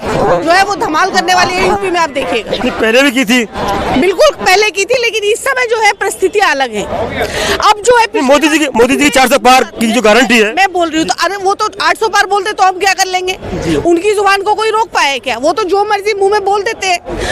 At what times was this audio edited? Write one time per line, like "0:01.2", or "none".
none